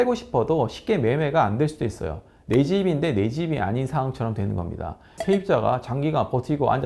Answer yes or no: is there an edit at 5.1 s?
yes